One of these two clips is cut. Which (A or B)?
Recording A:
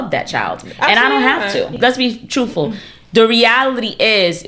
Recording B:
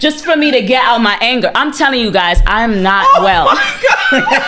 A